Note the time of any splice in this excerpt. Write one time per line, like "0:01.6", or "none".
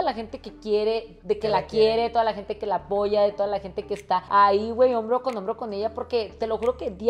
none